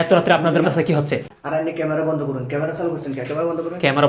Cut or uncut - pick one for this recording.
cut